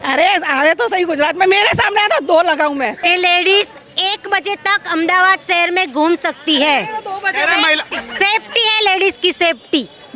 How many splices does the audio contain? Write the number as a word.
one